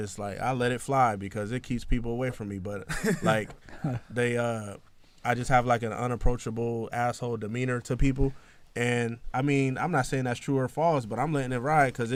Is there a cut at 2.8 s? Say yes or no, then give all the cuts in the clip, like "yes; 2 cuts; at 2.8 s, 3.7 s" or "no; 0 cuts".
no; 0 cuts